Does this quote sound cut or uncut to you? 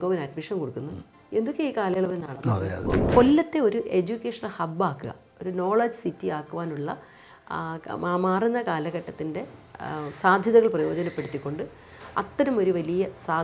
cut